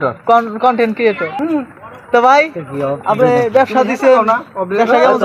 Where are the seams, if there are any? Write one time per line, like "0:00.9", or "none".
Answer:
0:01.3